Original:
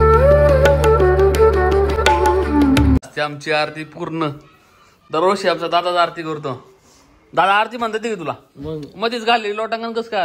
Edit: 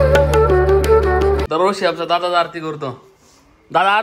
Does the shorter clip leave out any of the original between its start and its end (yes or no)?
yes